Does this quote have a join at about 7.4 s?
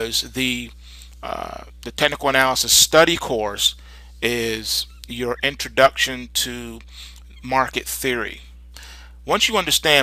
no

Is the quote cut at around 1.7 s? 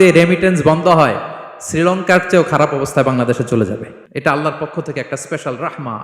no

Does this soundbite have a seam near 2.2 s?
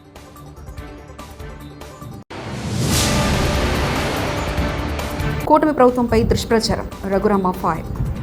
yes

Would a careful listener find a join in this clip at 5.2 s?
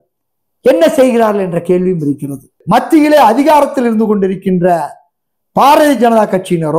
no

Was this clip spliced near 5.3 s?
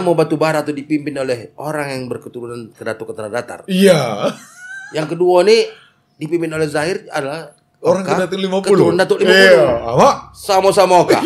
no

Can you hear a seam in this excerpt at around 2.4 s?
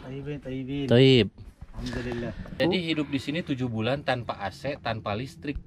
yes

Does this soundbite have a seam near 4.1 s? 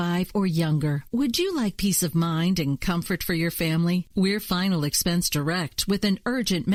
no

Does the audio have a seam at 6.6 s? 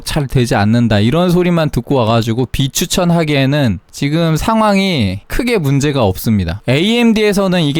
yes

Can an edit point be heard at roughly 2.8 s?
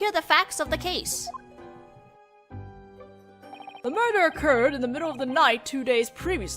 yes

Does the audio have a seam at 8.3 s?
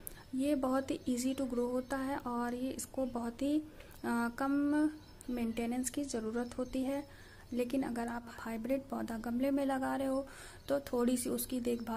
yes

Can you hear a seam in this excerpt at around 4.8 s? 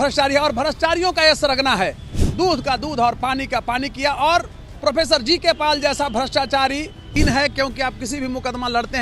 no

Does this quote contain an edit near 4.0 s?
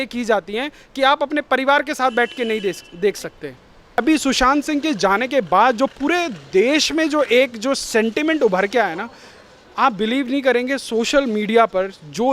yes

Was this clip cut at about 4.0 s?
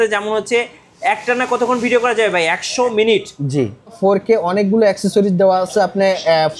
yes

